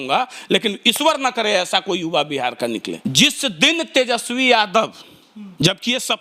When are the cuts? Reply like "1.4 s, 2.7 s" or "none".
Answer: 2.9 s